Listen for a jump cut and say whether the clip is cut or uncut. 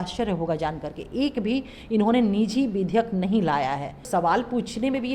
cut